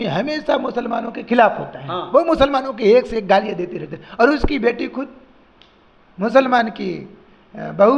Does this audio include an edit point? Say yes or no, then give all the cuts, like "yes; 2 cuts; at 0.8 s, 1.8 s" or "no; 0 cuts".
no; 0 cuts